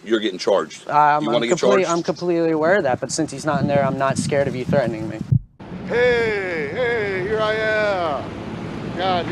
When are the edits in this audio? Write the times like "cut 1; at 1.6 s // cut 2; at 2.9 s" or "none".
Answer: cut 1; at 5.2 s